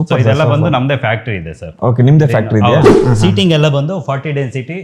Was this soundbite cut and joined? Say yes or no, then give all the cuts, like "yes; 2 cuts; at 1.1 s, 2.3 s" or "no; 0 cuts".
yes; 1 cut; at 2.9 s